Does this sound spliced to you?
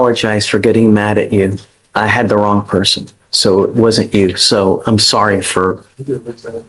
no; 0 cuts

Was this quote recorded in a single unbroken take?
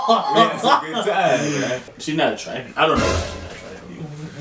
no; 1 cut; at 1.9 s

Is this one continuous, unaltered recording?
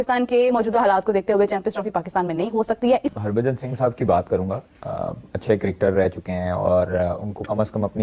no; 1 cut; at 3.1 s

